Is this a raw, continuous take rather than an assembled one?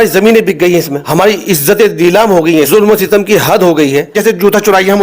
no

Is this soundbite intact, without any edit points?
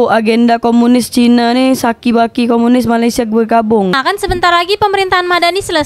no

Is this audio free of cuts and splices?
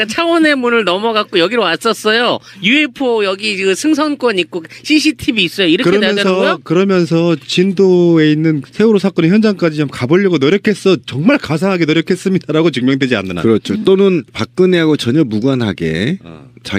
no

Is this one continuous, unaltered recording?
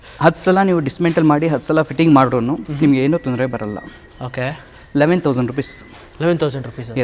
yes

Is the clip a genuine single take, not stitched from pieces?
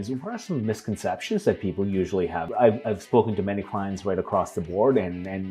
no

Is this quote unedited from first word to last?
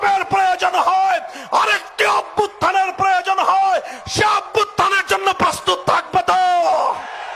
yes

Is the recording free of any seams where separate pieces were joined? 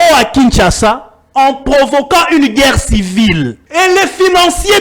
no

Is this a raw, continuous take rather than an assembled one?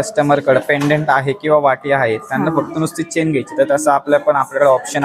yes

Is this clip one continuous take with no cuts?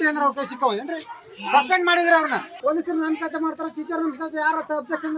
no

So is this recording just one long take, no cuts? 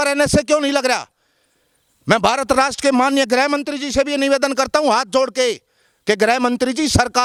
yes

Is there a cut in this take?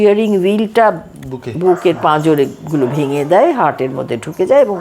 no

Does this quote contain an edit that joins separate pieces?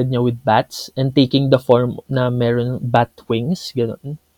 no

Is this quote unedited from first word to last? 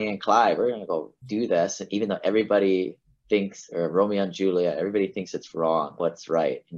yes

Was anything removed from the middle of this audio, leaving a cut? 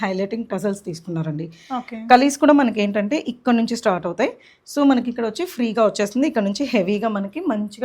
no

